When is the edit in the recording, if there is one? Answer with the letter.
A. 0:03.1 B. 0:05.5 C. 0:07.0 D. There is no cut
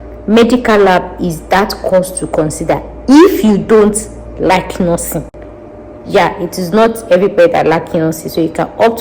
D